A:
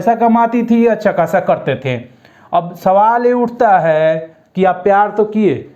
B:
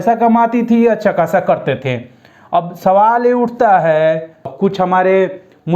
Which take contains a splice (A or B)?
B